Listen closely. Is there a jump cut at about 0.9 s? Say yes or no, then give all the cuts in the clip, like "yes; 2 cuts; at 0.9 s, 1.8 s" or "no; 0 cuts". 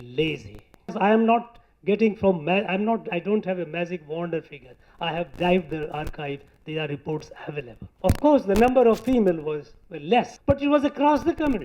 yes; 3 cuts; at 0.9 s, 7.8 s, 10.3 s